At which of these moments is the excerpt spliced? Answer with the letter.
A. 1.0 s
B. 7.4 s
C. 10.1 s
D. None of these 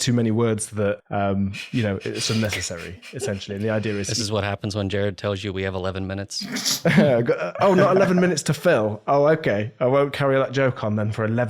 A